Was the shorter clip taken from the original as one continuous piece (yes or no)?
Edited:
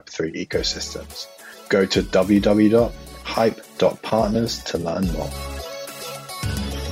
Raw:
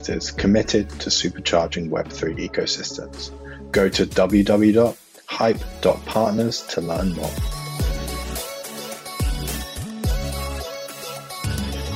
no